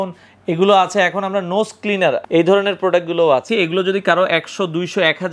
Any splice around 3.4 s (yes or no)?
yes